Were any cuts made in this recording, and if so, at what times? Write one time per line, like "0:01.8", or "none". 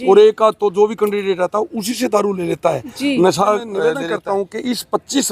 0:03.9